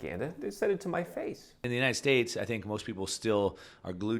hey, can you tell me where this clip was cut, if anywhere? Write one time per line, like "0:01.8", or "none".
0:01.6